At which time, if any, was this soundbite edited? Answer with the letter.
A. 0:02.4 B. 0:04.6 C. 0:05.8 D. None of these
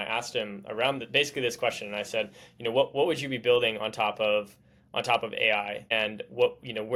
D